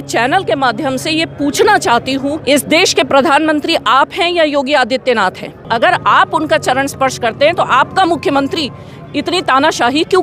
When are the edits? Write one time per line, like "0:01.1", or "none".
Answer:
0:02.4
0:05.7